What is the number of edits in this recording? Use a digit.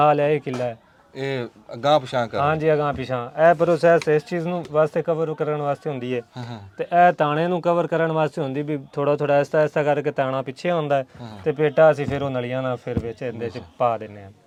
0